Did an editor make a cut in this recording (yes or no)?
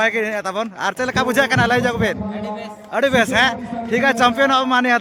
no